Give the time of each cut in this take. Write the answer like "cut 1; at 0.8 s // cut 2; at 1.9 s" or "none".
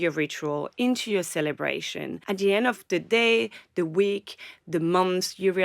cut 1; at 2.1 s